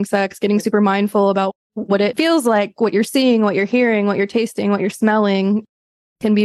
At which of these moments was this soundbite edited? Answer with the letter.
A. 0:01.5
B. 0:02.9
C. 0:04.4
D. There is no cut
A